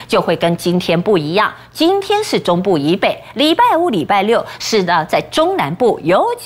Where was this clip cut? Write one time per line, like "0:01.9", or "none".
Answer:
none